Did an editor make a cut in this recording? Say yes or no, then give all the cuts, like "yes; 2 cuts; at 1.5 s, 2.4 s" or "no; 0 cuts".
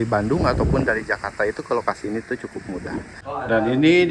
yes; 1 cut; at 3.2 s